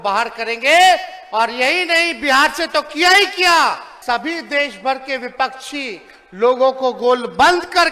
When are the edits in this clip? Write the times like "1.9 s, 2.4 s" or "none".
3.9 s